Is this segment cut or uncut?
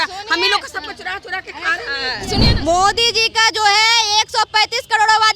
cut